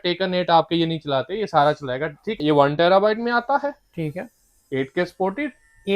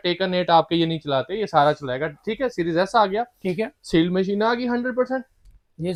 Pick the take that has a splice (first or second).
first